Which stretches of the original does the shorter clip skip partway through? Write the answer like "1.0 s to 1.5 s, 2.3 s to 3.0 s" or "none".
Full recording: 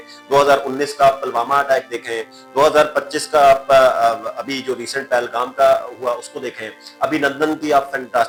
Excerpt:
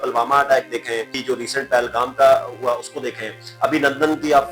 2.3 s to 4.5 s